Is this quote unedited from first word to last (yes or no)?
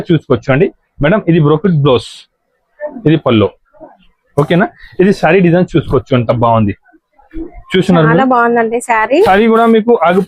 no